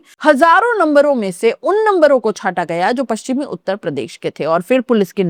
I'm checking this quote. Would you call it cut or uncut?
uncut